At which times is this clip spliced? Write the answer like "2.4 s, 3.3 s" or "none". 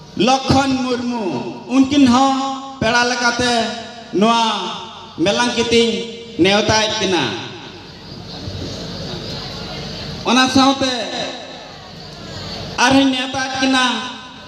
none